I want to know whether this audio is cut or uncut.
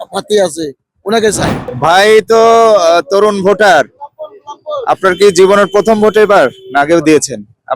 cut